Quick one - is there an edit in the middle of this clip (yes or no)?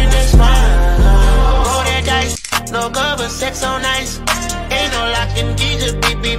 no